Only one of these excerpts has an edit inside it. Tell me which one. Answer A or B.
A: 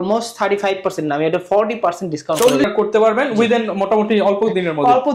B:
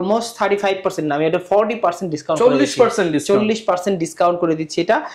A